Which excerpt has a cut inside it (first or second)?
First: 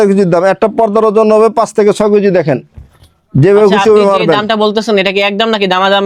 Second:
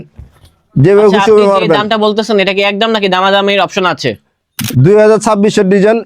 second